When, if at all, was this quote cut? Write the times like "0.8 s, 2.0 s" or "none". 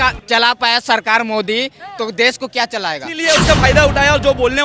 3.2 s